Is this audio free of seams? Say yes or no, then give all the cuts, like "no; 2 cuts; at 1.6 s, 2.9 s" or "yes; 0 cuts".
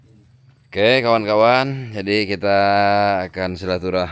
yes; 0 cuts